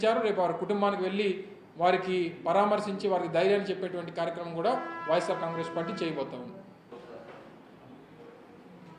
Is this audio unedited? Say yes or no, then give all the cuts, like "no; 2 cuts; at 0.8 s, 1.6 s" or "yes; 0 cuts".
no; 1 cut; at 6.9 s